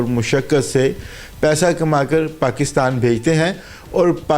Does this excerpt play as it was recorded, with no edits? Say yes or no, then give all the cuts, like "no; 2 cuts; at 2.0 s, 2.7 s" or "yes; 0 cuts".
yes; 0 cuts